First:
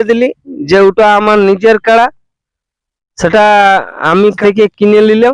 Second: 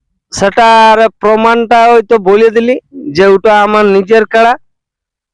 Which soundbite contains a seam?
first; 1 cut; at 4.4 s

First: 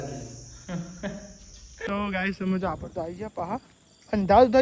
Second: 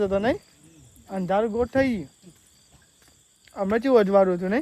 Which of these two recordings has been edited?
first; 1 cut; at 1.9 s

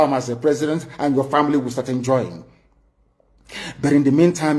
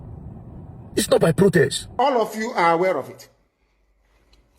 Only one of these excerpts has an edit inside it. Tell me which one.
second; 1 cut; at 1.8 s

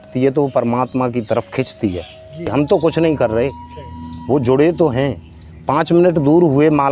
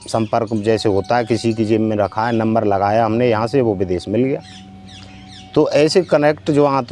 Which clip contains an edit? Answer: first; 1 cut; at 2.5 s

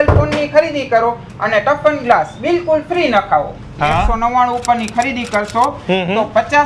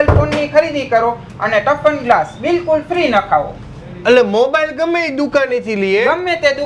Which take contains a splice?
first; 1 cut; at 3.7 s

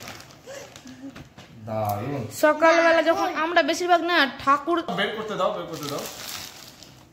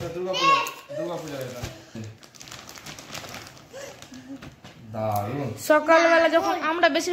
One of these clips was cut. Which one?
first; 1 cut; at 4.9 s

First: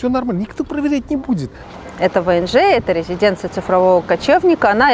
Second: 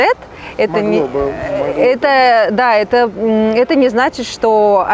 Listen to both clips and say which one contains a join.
first; 1 cut; at 1.6 s

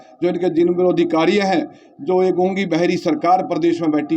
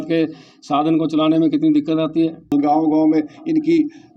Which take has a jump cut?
second; 1 cut; at 2.5 s

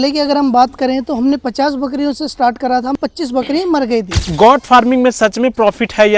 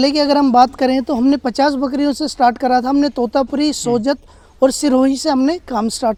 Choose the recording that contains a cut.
first; 2 cuts; at 2.9 s, 4.3 s

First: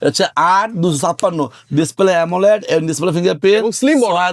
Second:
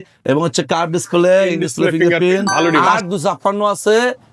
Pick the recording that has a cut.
second; 1 cut; at 2.9 s

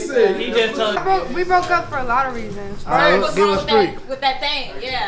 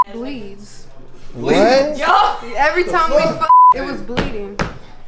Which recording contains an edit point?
first; 1 cut; at 1.0 s

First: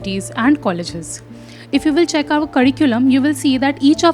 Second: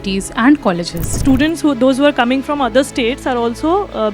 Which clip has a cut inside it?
second; 1 cut; at 1.2 s

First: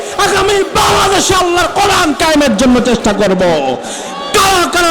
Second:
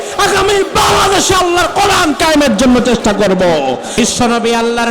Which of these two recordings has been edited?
second; 1 cut; at 3.9 s

